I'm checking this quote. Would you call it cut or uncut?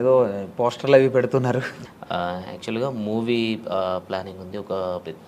cut